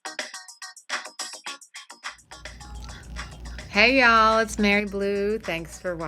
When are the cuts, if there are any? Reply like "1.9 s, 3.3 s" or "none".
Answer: none